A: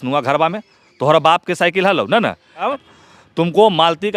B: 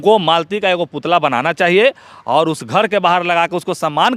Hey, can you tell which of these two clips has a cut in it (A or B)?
A